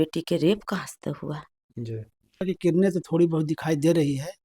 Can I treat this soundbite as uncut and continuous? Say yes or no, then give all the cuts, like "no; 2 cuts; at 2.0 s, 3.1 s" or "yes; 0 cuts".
no; 1 cut; at 2.4 s